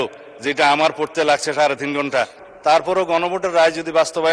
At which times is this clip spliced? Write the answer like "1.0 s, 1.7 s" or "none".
2.4 s